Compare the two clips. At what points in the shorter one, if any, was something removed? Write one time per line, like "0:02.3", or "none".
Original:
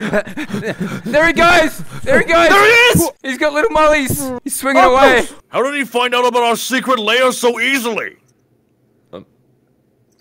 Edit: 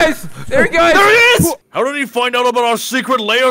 0:01.6